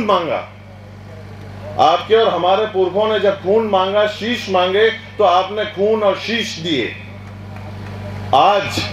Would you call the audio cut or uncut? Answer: uncut